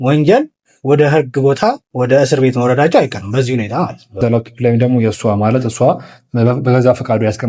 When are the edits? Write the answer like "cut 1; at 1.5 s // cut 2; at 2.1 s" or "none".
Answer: cut 1; at 4.2 s